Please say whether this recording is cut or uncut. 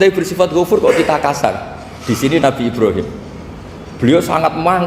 uncut